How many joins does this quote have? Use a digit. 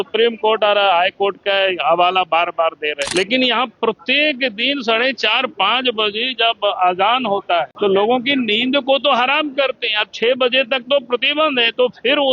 2